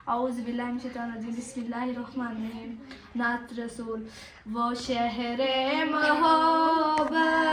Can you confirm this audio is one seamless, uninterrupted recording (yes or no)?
yes